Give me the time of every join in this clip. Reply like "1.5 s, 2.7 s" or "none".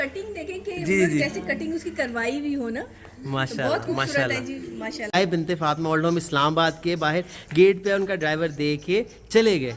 5.1 s